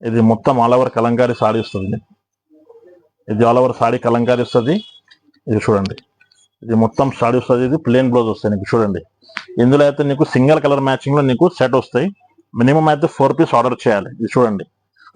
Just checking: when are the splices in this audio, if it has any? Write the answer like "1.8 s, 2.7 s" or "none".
none